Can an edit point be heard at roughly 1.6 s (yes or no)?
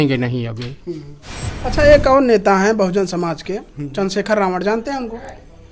yes